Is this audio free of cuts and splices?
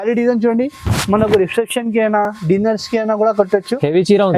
yes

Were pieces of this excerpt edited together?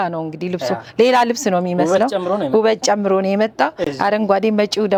no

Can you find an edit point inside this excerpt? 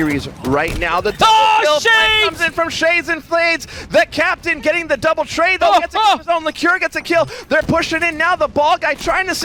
no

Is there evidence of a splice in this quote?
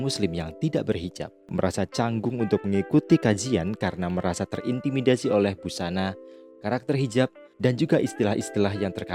no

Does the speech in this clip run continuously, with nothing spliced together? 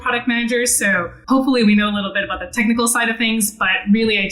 no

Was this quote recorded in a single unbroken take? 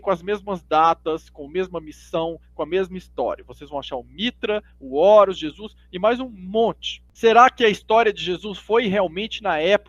yes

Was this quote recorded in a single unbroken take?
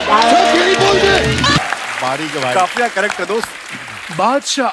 no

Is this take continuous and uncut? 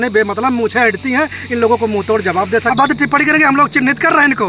no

